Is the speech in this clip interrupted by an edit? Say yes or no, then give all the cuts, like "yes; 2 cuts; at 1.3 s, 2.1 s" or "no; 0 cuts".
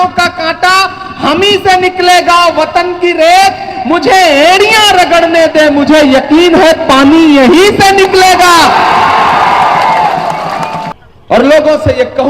yes; 1 cut; at 10.9 s